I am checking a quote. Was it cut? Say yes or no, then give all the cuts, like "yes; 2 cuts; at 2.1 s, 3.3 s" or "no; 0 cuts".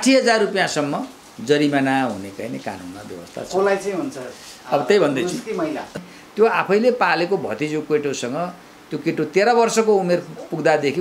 yes; 1 cut; at 5.9 s